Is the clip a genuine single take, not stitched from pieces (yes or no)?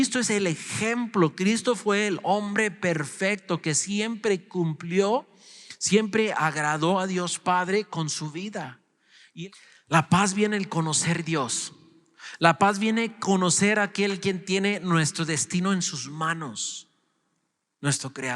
no